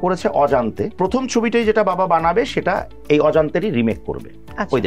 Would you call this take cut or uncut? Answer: cut